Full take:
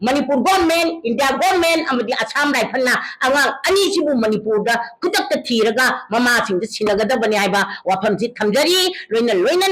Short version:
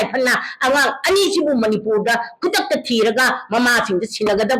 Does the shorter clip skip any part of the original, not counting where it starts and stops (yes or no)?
no